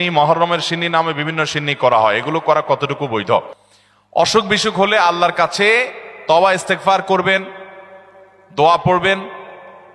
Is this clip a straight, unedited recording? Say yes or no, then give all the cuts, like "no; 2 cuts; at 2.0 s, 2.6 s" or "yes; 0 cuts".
yes; 0 cuts